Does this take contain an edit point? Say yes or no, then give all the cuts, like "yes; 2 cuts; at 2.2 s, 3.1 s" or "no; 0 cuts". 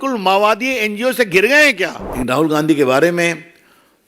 yes; 1 cut; at 2.0 s